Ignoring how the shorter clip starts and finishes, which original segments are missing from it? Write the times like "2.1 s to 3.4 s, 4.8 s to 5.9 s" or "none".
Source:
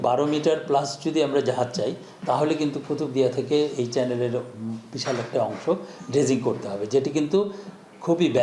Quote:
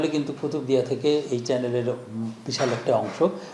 none